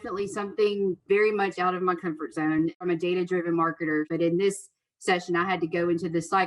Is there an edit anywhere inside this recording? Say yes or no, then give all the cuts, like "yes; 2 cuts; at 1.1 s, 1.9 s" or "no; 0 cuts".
yes; 3 cuts; at 1.0 s, 2.8 s, 4.1 s